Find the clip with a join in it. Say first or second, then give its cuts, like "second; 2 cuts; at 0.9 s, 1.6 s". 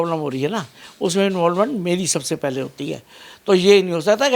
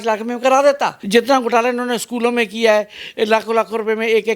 second; 1 cut; at 1.0 s